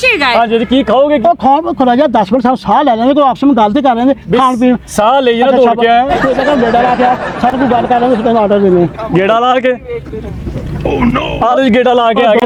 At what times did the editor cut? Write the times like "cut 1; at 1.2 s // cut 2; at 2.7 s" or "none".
none